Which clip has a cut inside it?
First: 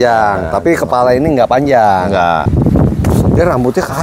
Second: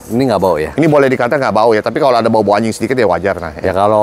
first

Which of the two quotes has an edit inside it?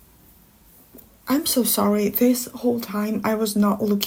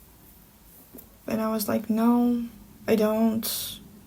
second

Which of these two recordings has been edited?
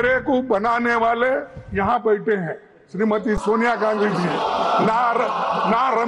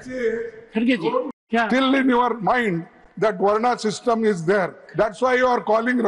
second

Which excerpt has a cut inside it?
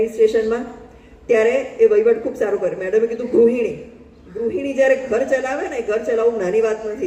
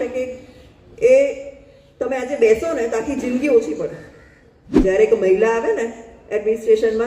second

